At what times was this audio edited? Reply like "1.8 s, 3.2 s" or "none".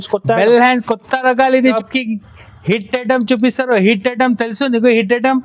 1.7 s